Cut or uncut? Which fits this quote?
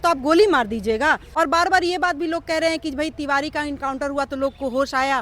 cut